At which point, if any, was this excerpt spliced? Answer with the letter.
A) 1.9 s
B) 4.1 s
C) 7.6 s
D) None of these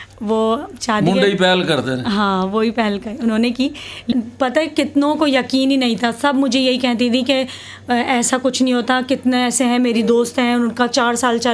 B